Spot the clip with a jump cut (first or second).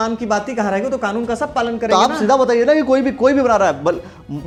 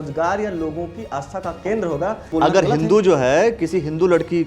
second